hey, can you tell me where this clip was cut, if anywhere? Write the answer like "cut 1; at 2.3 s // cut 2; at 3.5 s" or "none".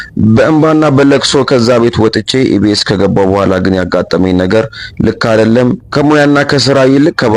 none